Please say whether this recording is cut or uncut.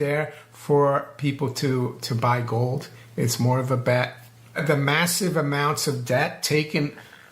cut